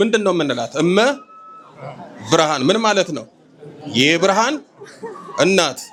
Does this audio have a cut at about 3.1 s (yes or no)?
no